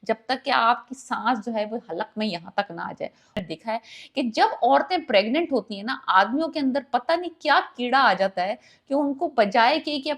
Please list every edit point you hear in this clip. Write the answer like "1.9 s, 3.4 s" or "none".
3.4 s